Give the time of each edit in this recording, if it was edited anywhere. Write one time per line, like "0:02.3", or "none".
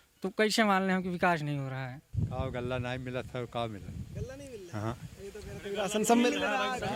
0:02.0